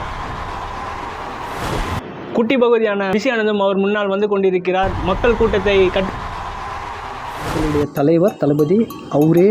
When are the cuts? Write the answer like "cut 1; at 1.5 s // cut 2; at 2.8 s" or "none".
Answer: cut 1; at 7.7 s